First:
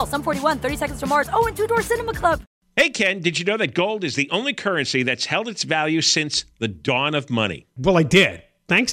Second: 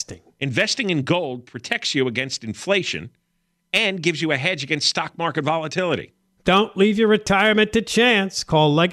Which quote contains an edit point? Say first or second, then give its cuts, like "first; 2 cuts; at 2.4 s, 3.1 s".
first; 1 cut; at 2.6 s